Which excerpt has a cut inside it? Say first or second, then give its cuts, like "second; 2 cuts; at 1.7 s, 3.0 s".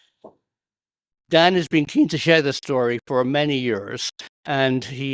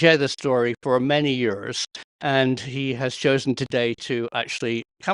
first; 1 cut; at 1.1 s